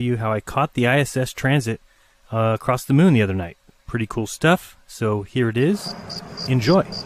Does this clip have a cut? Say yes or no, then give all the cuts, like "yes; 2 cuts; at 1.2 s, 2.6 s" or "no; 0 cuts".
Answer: yes; 1 cut; at 1.4 s